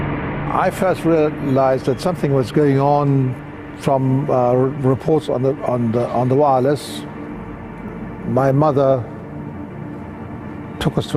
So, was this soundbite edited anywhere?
yes; 1 cut; at 5.4 s

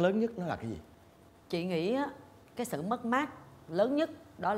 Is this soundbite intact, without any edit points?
yes; 0 cuts

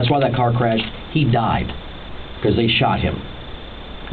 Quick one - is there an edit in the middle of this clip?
no; 0 cuts

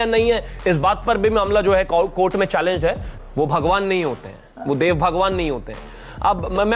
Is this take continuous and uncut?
no; 1 cut; at 3.2 s

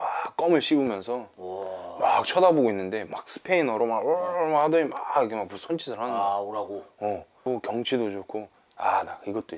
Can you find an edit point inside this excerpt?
yes; 1 cut; at 7.4 s

